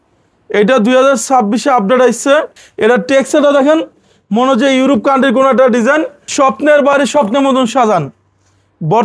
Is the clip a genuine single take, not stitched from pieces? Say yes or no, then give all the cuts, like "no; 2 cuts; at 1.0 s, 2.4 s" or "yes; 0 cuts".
no; 2 cuts; at 2.6 s, 6.2 s